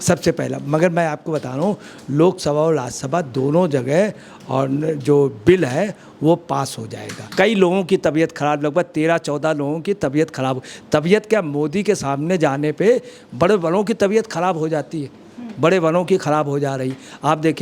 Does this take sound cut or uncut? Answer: cut